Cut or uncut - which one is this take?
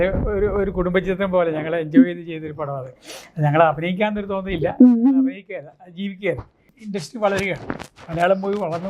cut